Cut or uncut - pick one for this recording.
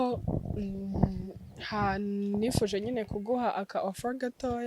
uncut